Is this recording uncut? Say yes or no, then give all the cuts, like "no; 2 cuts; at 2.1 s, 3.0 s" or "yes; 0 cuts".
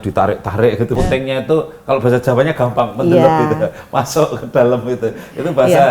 no; 1 cut; at 0.9 s